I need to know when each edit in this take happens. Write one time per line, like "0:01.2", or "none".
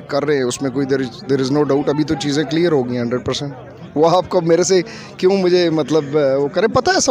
none